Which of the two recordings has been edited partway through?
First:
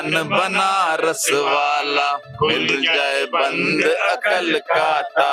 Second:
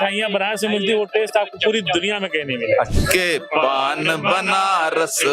second; 1 cut; at 2.9 s

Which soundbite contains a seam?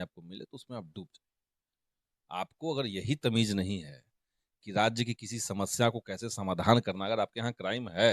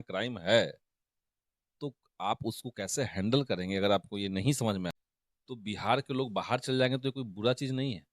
second; 1 cut; at 4.9 s

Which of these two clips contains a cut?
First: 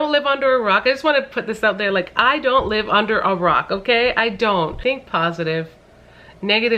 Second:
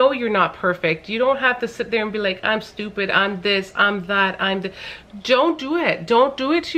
first; 1 cut; at 4.8 s

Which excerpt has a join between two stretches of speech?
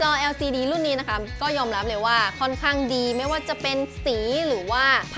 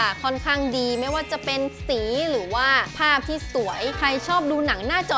second; 1 cut; at 3.9 s

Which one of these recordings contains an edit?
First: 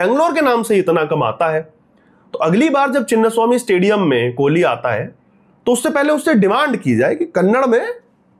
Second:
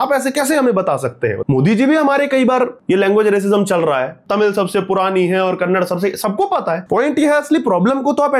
second; 4 cuts; at 1.4 s, 2.8 s, 4.2 s, 6.8 s

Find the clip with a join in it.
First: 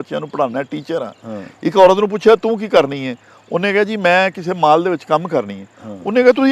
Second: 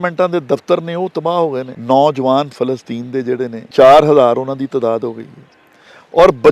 second; 2 cuts; at 1.7 s, 3.7 s

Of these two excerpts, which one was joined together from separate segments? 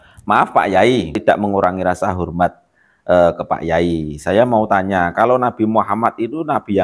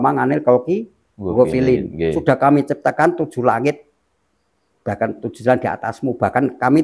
first; 1 cut; at 1.2 s

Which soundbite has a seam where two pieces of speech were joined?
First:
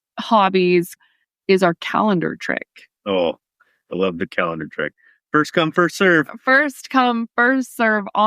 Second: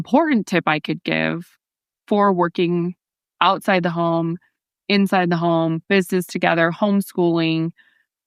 first; 1 cut; at 1.0 s

